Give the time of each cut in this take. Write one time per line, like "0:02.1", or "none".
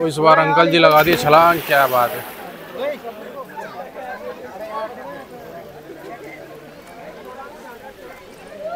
none